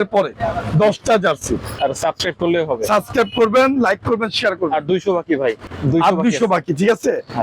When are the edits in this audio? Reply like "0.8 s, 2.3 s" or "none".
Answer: 1.7 s, 5.7 s